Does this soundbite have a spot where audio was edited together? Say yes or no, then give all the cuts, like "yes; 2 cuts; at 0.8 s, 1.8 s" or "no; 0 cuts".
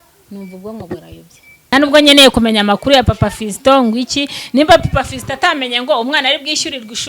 yes; 1 cut; at 1.7 s